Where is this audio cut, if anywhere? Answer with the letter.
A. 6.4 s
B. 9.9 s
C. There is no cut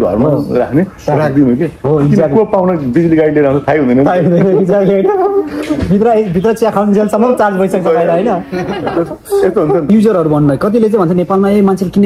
B